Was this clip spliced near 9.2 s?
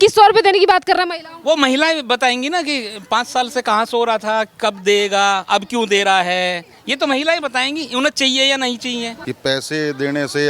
yes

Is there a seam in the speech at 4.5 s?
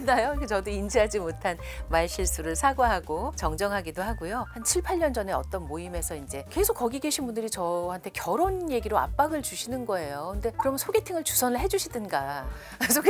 no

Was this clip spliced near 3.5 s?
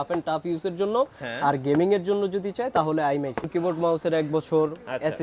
yes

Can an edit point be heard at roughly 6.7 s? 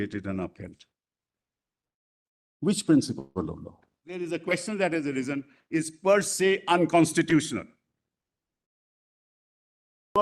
no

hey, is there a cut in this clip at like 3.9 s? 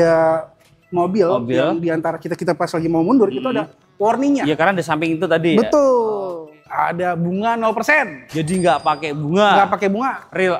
no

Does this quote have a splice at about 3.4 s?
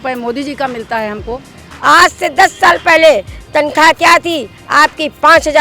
no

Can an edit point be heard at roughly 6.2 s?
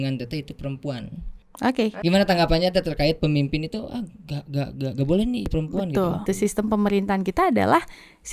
yes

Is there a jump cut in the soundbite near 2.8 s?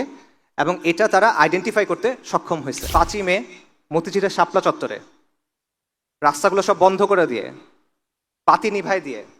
yes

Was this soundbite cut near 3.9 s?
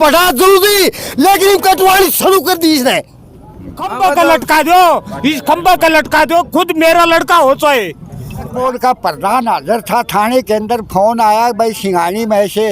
yes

